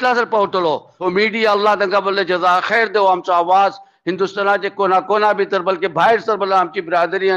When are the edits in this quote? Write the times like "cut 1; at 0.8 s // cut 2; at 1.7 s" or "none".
cut 1; at 0.9 s